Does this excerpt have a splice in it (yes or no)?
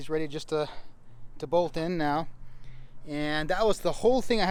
no